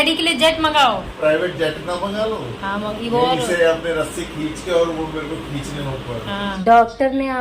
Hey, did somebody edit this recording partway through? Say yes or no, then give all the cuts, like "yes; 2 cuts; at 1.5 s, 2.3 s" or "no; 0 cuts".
yes; 2 cuts; at 1.1 s, 6.6 s